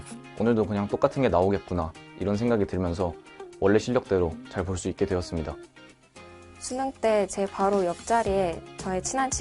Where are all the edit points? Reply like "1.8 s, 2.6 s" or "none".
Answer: none